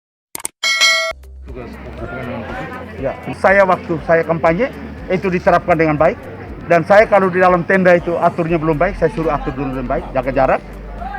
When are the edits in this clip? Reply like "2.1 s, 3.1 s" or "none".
1.1 s